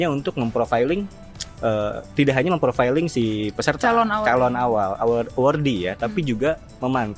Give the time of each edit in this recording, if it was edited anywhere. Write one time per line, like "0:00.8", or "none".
none

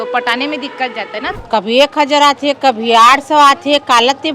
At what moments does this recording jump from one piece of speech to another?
0:01.4

